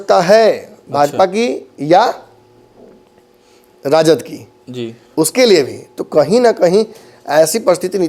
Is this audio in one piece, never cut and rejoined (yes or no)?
yes